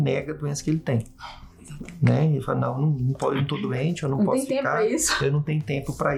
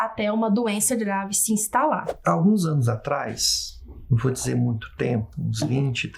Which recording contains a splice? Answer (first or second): second